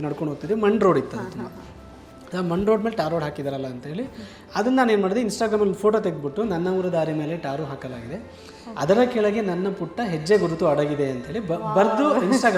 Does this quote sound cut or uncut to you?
uncut